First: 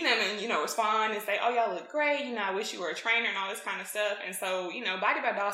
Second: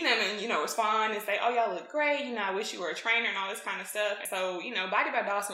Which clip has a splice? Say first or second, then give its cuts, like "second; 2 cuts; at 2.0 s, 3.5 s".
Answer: second; 1 cut; at 4.2 s